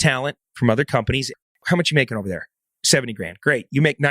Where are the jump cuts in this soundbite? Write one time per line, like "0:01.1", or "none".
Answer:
0:01.5

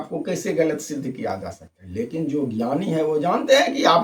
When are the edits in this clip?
none

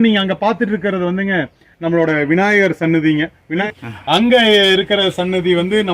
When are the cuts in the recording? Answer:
0:03.7

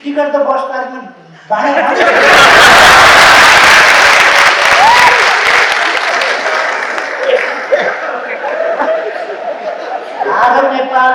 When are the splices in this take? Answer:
none

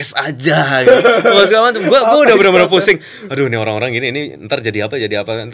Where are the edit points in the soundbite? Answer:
none

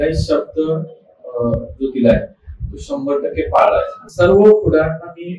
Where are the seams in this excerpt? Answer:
0:04.0

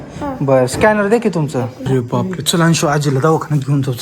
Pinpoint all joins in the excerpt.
0:01.9

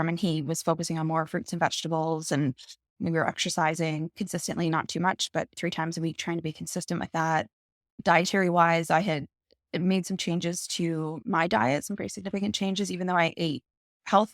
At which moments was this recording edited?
0:03.0
0:04.1

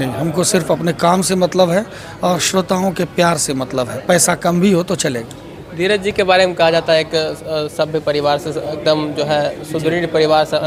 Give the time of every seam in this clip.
none

